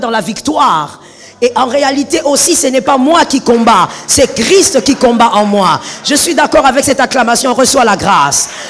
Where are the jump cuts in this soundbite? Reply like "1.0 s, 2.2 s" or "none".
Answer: none